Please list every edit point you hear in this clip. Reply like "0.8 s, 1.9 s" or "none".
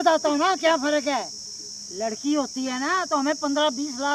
none